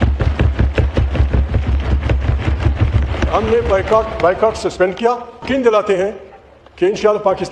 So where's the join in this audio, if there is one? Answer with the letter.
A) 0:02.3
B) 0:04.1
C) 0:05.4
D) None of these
C